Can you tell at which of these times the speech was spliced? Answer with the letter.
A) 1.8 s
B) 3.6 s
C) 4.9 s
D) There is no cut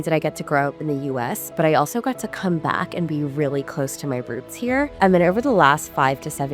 C